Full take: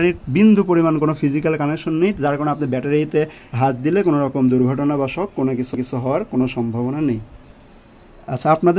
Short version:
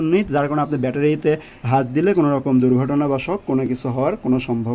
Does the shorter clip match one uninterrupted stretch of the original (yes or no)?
no